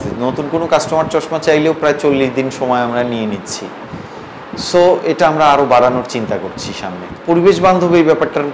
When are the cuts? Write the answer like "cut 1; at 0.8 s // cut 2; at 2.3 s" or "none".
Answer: none